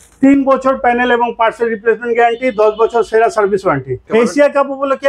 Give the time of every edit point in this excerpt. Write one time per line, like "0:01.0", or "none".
0:04.0